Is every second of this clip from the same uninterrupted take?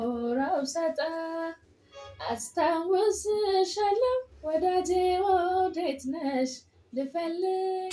no; 1 cut; at 4.3 s

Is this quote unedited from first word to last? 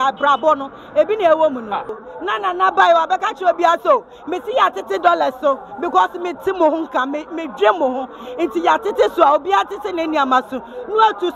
no; 1 cut; at 2.0 s

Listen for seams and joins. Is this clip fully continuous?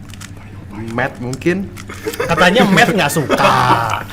yes; 0 cuts

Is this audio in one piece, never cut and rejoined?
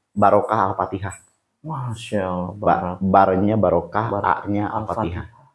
yes; 0 cuts

